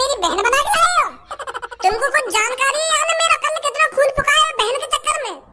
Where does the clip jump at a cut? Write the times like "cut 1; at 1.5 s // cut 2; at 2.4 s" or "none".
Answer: none